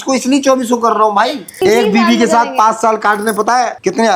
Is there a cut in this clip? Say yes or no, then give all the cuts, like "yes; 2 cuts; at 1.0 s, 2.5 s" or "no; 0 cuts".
yes; 1 cut; at 1.6 s